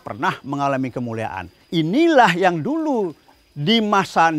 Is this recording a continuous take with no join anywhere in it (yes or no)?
no